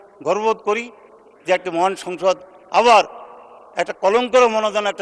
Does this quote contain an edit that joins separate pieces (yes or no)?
no